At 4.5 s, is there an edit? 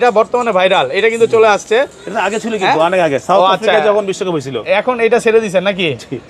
no; 0 cuts

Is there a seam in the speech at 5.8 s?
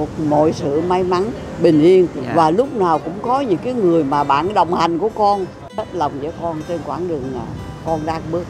yes; 1 cut; at 5.8 s

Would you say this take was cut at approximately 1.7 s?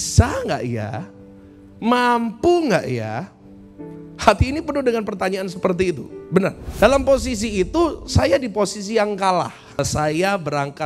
no; 2 cuts; at 6.6 s, 9.8 s

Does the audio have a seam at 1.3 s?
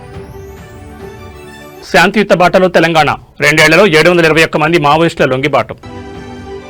no; 0 cuts

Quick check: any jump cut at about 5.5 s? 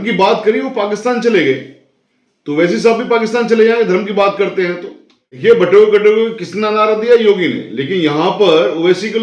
yes; 1 cut; at 5.5 s

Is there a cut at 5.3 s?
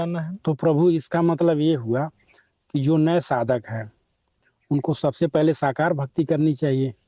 no; 0 cuts

